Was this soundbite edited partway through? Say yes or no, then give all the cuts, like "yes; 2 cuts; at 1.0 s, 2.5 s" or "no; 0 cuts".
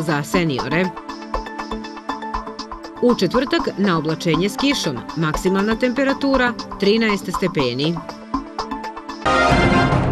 yes; 1 cut; at 9.1 s